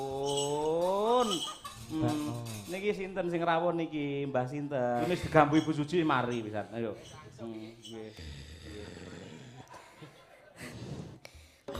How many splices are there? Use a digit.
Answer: 1